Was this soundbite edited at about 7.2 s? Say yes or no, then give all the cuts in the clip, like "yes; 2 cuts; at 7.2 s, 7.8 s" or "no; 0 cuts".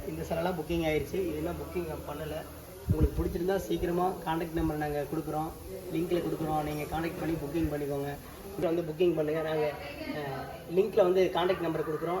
no; 1 cut; at 8.6 s